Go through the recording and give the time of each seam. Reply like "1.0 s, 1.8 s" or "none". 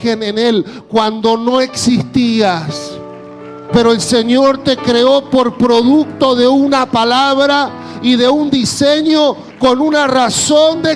none